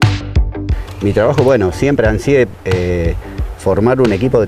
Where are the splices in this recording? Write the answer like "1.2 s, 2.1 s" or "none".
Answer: 0.9 s